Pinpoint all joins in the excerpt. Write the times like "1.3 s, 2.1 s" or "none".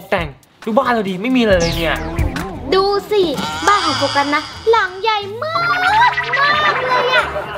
2.5 s